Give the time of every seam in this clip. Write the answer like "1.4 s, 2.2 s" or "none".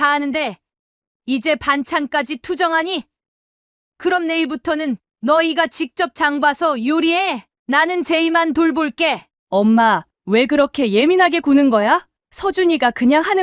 9.3 s